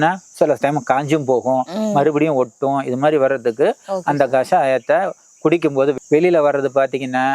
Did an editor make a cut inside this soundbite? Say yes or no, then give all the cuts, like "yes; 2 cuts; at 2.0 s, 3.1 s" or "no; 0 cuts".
yes; 1 cut; at 6.0 s